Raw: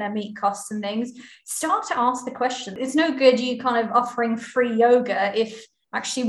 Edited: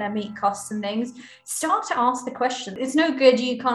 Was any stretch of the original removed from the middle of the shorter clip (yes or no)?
no